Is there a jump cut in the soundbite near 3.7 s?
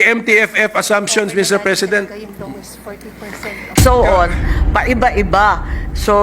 yes; 1 cut; at 3.7 s

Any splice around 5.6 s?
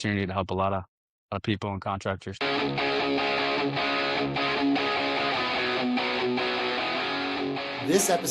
no; 1 cut; at 2.3 s

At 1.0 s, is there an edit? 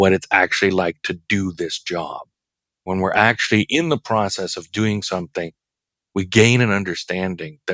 no; 1 cut; at 2.9 s

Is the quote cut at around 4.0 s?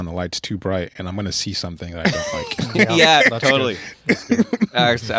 no; 0 cuts

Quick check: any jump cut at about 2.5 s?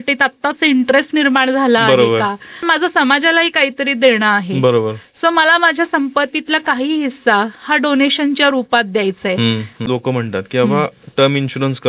yes; 2 cuts; at 2.5 s, 9.8 s

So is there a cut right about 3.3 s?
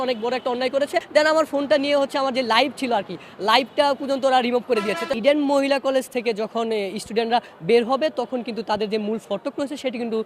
no; 2 cuts; at 1.1 s, 5.1 s

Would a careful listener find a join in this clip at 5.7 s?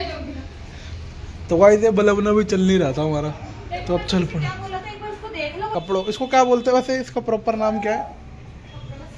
yes; 1 cut; at 5.7 s

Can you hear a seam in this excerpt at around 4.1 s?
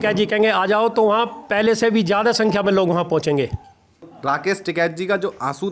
yes; 1 cut; at 4.1 s

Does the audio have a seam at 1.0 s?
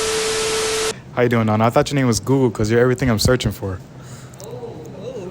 yes; 1 cut; at 1.0 s

